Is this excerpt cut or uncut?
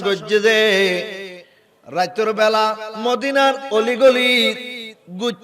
cut